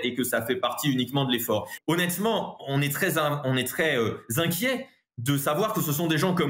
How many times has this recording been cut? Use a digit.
1